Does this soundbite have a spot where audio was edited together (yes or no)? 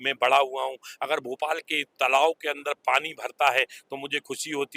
no